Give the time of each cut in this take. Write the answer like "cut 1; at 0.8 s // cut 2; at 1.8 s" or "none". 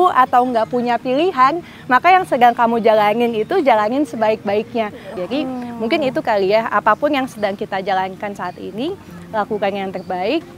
cut 1; at 5.1 s